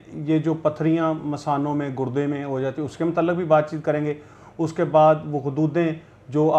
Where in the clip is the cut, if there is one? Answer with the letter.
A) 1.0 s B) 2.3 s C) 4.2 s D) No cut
D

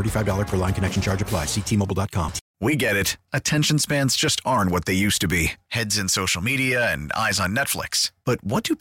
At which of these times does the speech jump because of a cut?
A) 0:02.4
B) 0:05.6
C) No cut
A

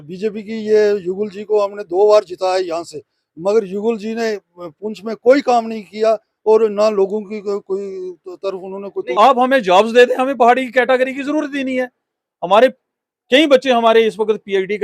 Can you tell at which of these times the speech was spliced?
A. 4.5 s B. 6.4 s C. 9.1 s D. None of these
C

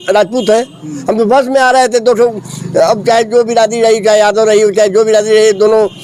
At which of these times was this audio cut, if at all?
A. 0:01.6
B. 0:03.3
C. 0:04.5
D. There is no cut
D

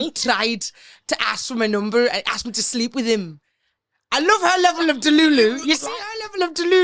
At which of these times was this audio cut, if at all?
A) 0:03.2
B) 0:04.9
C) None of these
C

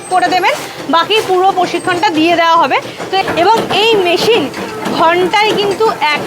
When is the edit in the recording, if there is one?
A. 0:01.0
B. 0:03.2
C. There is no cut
B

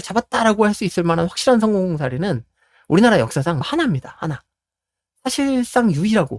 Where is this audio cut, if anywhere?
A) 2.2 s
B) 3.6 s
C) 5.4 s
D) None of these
B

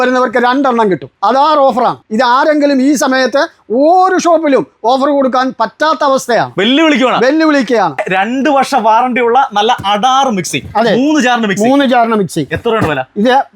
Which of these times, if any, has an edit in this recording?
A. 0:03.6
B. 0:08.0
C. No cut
B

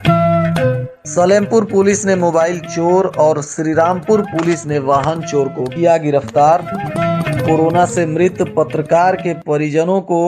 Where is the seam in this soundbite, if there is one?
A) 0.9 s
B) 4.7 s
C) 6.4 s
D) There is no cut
A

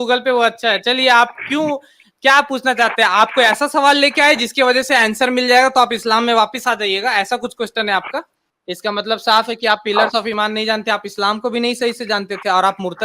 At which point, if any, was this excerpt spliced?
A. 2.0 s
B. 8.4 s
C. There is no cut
B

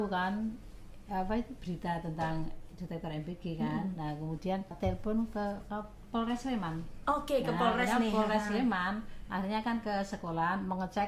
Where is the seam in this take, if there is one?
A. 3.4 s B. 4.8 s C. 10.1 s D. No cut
B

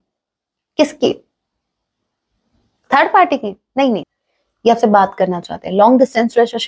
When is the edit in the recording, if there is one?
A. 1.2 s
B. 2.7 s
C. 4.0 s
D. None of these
C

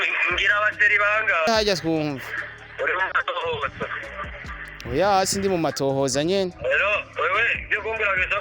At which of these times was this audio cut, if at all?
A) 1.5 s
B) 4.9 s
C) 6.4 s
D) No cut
A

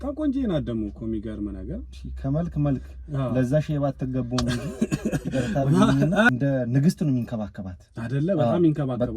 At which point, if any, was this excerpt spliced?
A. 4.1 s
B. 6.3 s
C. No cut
B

